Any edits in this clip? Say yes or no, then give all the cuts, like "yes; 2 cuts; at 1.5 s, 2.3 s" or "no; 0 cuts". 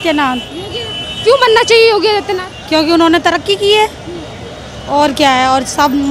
no; 0 cuts